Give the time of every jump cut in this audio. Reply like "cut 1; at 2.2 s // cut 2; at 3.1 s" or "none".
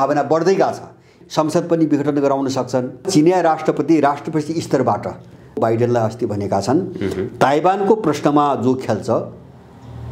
cut 1; at 1.1 s // cut 2; at 3.1 s // cut 3; at 5.6 s